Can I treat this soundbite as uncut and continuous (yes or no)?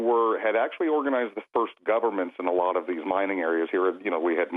no